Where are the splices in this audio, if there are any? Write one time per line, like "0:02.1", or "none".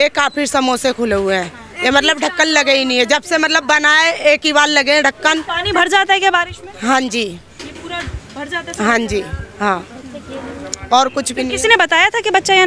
none